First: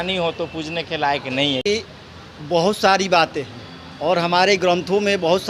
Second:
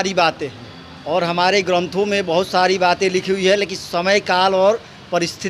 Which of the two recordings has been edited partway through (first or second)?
first